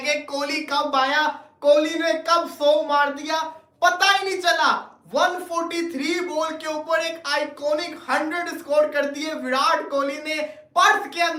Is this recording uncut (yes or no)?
yes